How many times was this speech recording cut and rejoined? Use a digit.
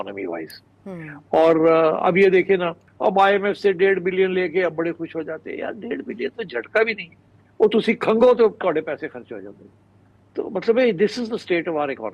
0